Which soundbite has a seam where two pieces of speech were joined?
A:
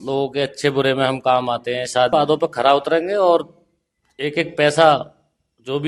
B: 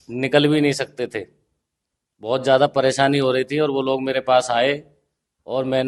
A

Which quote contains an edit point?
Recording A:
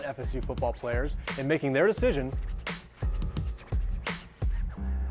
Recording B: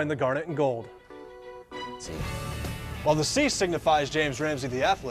B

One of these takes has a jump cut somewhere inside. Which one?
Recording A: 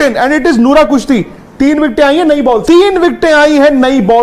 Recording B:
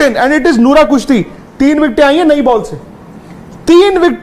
A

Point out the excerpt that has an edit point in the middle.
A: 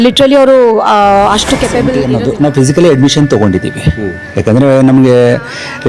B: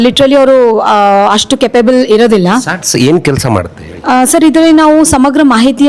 A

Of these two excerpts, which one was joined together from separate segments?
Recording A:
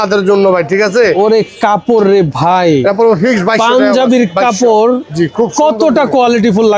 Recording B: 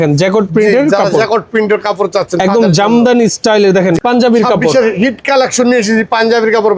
B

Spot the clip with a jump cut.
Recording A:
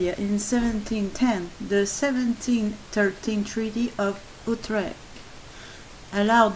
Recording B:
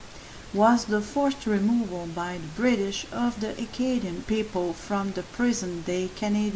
A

